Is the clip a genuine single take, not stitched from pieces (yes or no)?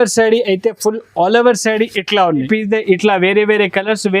no